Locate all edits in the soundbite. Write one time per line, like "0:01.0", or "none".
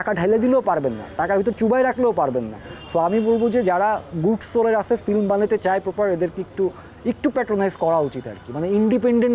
none